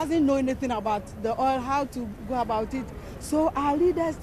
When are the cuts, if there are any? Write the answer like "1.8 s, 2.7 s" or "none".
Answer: 1.4 s